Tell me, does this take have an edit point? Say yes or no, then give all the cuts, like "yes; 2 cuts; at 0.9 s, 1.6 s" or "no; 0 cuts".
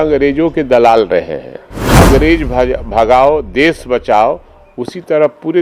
yes; 1 cut; at 1.9 s